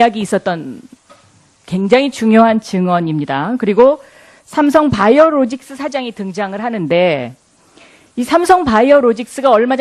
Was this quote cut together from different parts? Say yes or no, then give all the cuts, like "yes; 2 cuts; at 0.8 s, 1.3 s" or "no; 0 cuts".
yes; 1 cut; at 6.7 s